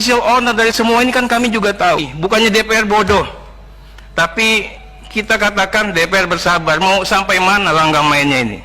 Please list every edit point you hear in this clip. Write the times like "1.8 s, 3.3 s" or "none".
2.1 s